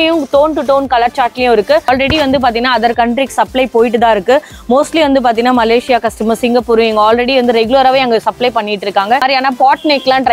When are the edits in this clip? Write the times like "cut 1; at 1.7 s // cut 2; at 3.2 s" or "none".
cut 1; at 1.9 s // cut 2; at 9.2 s